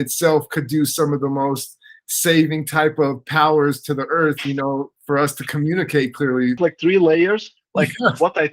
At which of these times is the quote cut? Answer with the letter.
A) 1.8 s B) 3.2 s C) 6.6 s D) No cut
C